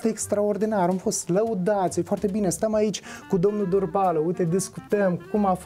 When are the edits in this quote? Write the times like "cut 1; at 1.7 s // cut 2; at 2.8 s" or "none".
none